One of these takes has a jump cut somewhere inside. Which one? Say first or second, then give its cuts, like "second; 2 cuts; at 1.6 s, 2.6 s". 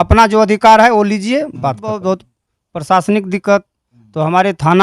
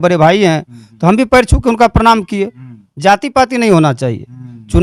first; 1 cut; at 2.0 s